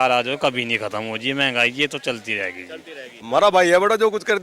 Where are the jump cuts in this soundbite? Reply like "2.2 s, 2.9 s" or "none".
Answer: 3.2 s